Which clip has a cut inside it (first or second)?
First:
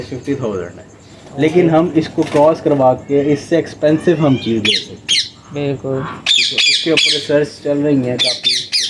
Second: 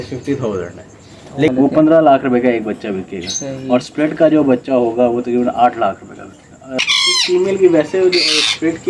second